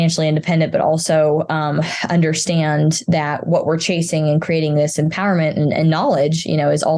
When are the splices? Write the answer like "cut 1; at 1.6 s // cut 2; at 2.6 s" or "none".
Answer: none